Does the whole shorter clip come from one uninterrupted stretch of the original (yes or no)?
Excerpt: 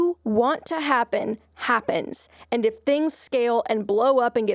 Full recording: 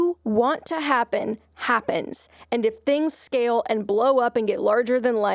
yes